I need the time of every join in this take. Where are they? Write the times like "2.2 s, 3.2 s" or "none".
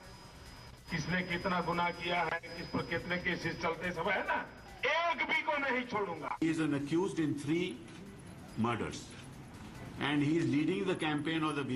4.6 s, 6.4 s